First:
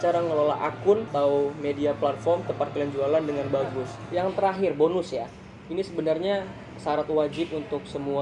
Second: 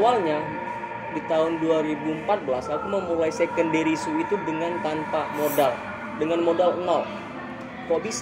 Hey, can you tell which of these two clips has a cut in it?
first; 2 cuts; at 1.1 s, 4.0 s

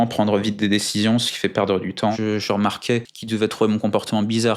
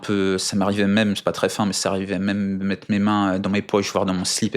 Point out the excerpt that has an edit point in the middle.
first; 2 cuts; at 2.1 s, 3.1 s

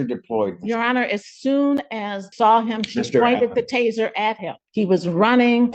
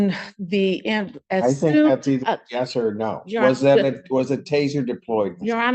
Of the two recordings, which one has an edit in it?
first; 2 cuts; at 2.2 s, 4.6 s

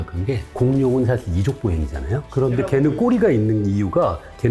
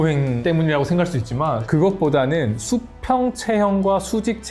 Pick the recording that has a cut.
second; 1 cut; at 1.6 s

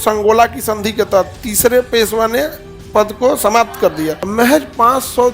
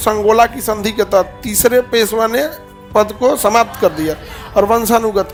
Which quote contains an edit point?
first; 1 cut; at 4.2 s

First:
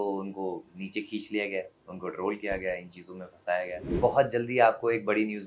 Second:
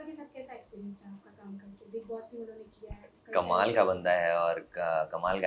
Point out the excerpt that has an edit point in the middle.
first; 1 cut; at 3.9 s

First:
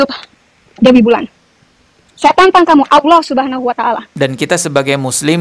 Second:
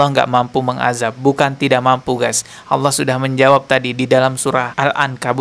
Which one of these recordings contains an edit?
first; 1 cut; at 4.1 s

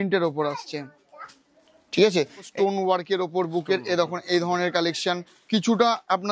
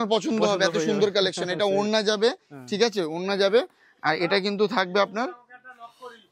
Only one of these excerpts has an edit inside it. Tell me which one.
first; 2 cuts; at 2.5 s, 5.3 s

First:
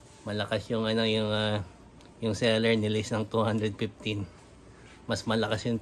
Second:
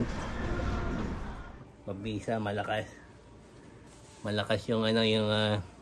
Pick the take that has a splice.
second; 1 cut; at 1.3 s

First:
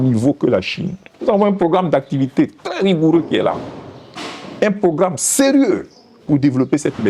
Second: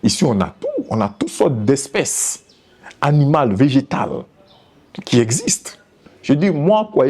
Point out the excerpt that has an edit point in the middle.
second; 1 cut; at 6.1 s

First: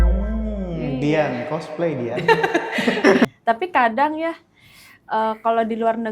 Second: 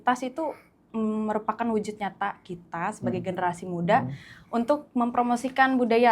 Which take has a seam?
first; 1 cut; at 3.3 s

